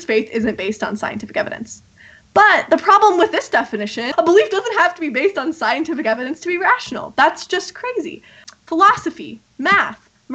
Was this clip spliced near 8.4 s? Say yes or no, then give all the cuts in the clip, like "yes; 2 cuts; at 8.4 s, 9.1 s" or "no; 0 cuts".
yes; 2 cuts; at 4.0 s, 8.4 s